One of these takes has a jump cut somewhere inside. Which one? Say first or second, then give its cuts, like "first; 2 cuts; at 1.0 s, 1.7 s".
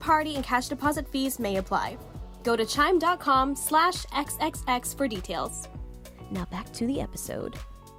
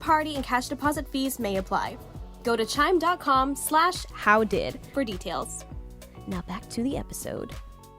second; 2 cuts; at 4.1 s, 4.9 s